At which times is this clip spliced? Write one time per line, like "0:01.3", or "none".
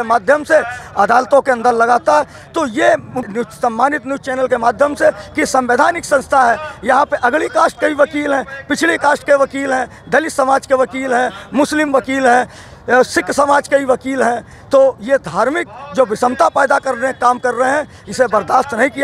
0:03.3